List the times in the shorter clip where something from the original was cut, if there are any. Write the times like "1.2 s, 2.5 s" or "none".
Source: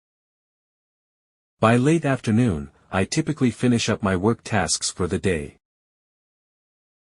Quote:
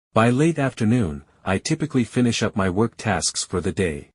none